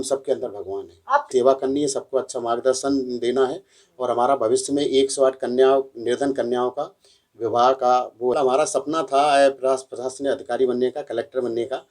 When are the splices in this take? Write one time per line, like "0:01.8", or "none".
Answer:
0:01.3
0:08.3